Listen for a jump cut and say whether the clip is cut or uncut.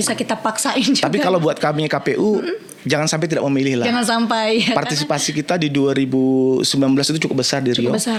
uncut